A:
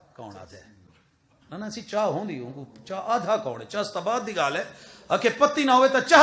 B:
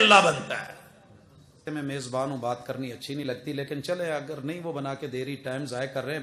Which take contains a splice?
B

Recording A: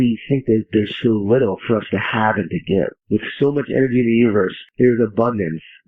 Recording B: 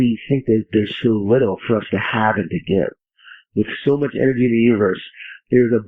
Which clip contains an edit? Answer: A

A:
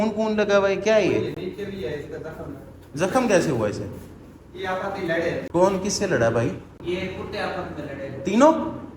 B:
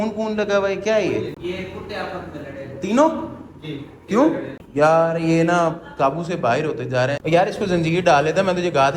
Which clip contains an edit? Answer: B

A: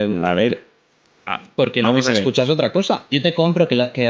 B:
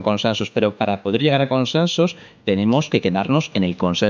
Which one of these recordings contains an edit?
A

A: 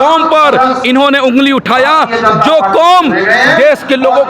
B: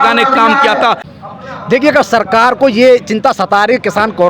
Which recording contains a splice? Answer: B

